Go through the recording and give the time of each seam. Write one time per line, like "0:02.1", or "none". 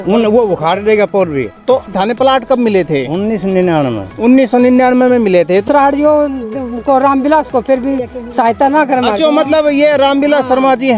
0:01.9
0:05.6